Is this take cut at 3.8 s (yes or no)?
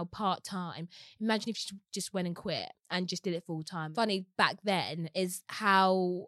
yes